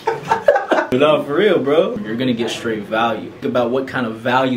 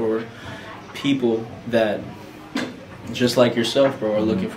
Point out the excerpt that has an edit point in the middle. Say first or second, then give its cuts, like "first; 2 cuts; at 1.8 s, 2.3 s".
first; 1 cut; at 3.4 s